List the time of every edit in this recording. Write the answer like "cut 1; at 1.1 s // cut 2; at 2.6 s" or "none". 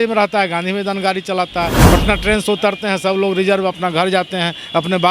cut 1; at 1.8 s